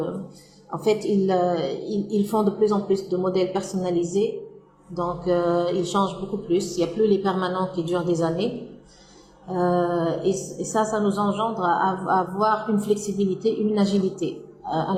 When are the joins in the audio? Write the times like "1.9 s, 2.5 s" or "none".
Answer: none

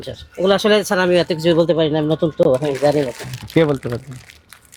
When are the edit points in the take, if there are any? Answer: none

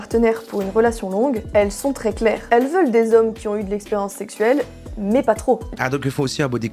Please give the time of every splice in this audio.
none

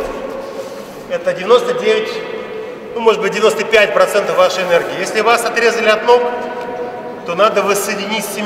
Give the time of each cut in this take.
none

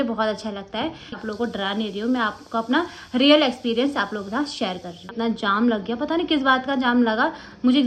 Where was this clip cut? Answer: 1.2 s, 5.1 s

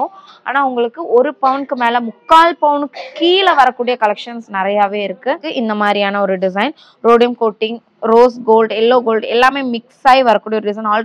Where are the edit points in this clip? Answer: 5.5 s

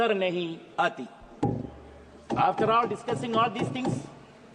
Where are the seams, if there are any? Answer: none

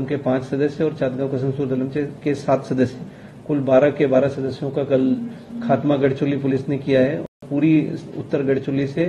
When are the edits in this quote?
7.3 s

